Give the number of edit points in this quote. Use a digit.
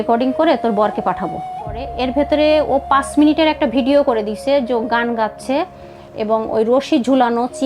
1